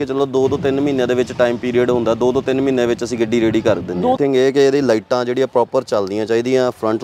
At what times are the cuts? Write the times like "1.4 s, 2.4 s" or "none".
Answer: 4.2 s